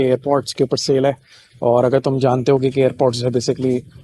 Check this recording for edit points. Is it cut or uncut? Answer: uncut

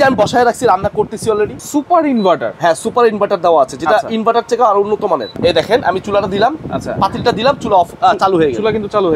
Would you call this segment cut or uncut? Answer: cut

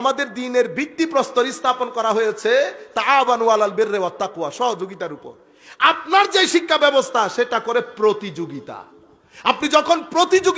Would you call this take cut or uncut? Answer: uncut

